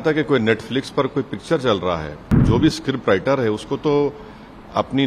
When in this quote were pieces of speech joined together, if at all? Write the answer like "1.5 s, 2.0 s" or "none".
2.4 s